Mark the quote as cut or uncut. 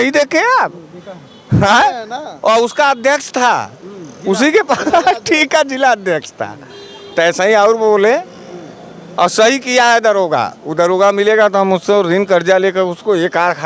uncut